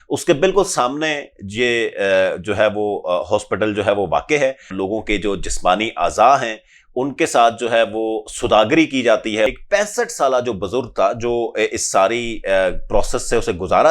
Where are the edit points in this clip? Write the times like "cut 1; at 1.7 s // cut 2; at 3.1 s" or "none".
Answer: cut 1; at 4.7 s // cut 2; at 9.5 s

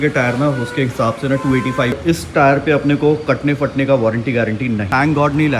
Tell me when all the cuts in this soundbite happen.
cut 1; at 2.0 s // cut 2; at 4.8 s

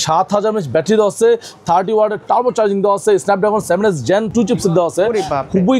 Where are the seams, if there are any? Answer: cut 1; at 4.3 s

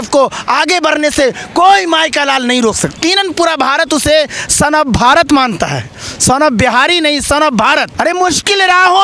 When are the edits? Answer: cut 1; at 3.0 s // cut 2; at 7.9 s

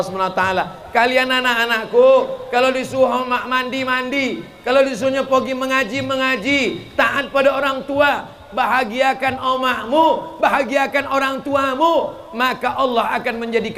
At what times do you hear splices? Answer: none

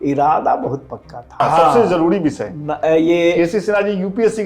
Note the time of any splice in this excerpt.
cut 1; at 1.4 s

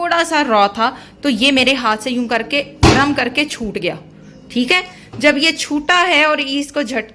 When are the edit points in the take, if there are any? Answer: none

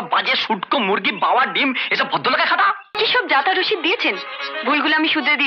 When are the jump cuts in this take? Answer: cut 1; at 2.9 s

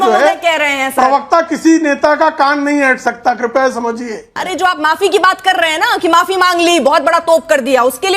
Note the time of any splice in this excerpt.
cut 1; at 4.4 s

